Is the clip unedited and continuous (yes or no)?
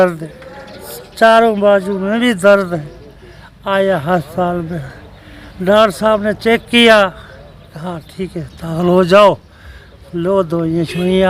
yes